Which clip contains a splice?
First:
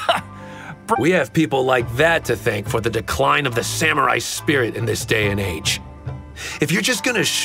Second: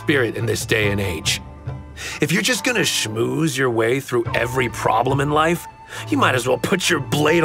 first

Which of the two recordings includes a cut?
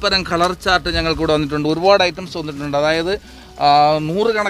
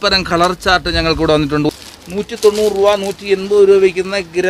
second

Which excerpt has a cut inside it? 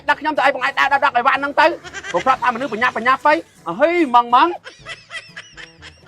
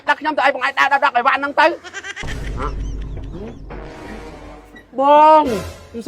second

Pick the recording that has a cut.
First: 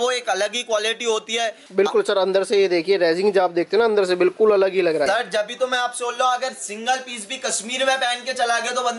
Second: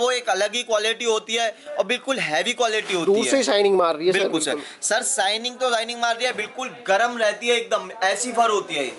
first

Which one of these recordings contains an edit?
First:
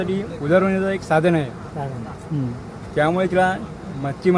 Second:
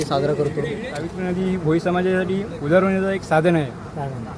second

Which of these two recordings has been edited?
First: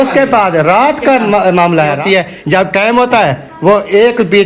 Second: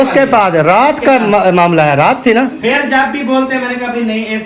first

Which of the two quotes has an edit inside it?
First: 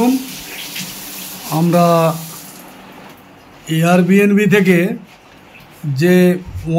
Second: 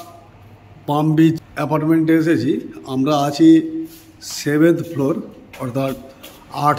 second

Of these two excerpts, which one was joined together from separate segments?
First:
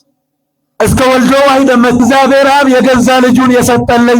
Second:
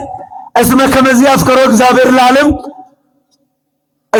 first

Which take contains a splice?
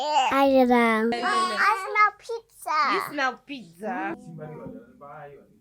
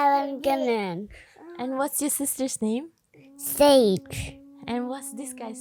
first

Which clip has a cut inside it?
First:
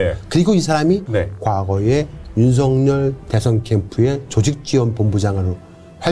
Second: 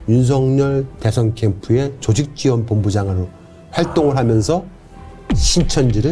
first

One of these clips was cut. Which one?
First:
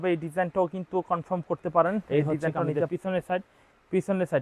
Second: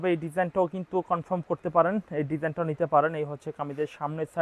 first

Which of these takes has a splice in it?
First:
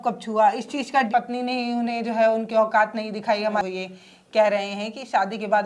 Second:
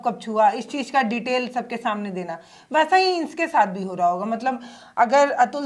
first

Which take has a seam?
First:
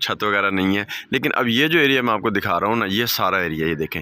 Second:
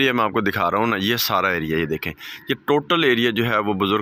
first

